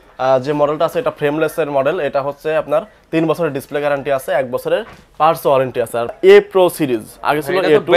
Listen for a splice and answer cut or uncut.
cut